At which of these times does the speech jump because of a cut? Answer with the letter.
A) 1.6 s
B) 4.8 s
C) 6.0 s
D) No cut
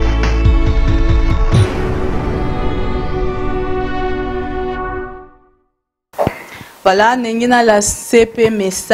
D